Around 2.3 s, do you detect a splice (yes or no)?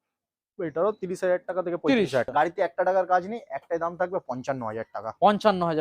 yes